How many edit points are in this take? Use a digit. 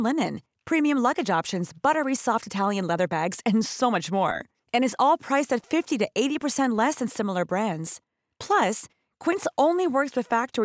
0